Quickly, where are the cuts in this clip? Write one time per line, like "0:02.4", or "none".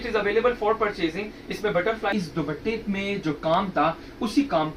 0:02.1